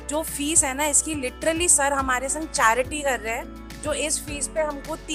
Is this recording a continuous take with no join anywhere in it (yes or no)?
yes